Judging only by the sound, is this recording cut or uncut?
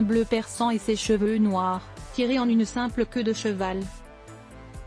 cut